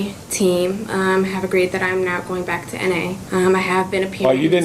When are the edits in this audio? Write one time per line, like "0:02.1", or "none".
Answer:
0:03.2

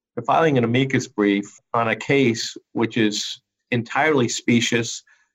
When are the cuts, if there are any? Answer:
0:01.6

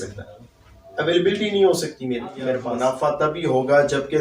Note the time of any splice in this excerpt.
0:02.6

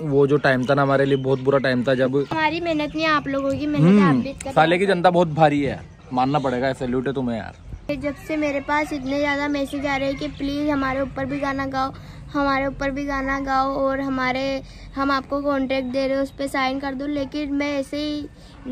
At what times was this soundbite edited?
0:02.4
0:07.9

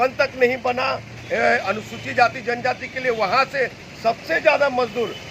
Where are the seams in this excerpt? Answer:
none

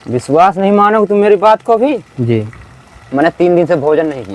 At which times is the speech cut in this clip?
none

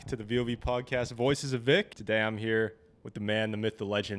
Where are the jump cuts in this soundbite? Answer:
0:02.0

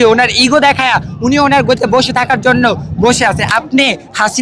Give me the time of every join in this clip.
0:03.4

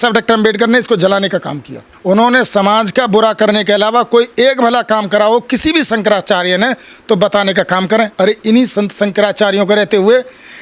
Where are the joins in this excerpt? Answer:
0:01.9

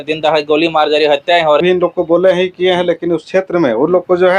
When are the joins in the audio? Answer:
0:01.6

